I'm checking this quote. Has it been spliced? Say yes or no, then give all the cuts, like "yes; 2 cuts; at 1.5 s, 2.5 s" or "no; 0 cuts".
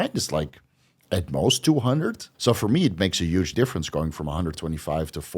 yes; 2 cuts; at 2.3 s, 3.5 s